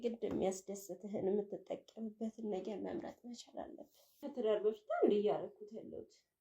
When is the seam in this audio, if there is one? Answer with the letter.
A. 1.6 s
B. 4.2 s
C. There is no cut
B